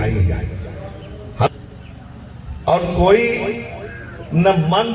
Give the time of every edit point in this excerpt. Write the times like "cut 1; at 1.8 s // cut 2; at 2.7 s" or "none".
cut 1; at 1.5 s